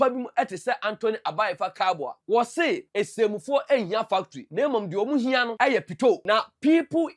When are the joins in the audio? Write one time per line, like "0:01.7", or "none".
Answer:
0:02.1
0:02.9
0:04.4
0:05.5
0:06.2